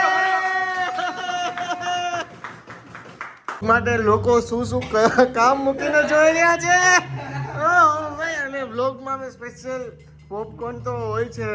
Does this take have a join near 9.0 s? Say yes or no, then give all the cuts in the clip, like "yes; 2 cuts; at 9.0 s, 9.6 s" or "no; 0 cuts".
no; 1 cut; at 3.5 s